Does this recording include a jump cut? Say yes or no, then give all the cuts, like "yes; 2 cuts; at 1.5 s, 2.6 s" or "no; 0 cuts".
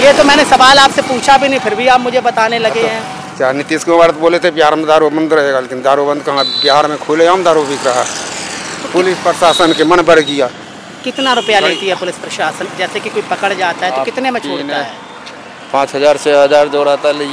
no; 0 cuts